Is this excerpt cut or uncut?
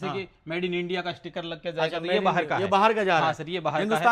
uncut